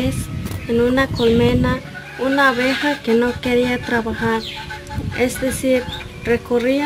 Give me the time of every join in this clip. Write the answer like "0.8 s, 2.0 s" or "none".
none